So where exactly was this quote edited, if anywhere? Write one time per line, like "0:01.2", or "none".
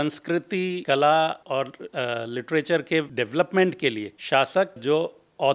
0:00.8
0:01.4
0:03.1
0:04.1
0:04.8